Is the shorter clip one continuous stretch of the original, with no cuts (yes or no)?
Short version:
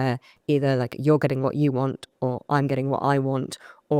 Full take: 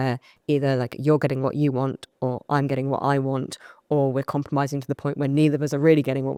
yes